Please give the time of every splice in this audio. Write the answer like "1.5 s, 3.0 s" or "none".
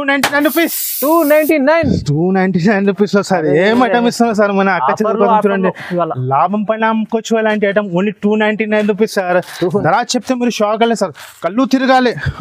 9.6 s